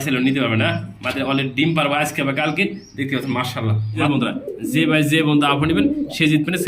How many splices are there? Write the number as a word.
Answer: one